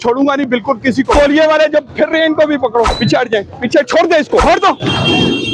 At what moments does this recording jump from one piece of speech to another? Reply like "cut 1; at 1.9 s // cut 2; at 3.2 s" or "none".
cut 1; at 1.1 s // cut 2; at 2.9 s // cut 3; at 4.4 s